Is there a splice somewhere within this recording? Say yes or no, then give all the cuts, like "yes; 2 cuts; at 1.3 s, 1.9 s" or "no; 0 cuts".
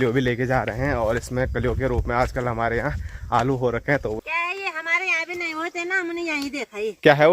yes; 1 cut; at 4.2 s